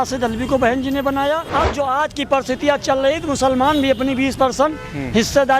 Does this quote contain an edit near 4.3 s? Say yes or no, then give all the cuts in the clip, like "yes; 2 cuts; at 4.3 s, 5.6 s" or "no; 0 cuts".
no; 1 cut; at 1.4 s